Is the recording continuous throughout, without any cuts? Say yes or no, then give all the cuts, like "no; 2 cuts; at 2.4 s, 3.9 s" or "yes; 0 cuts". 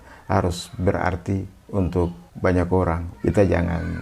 no; 2 cuts; at 2.2 s, 3.1 s